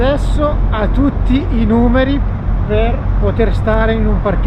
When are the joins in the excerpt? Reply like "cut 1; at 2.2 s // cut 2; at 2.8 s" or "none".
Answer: none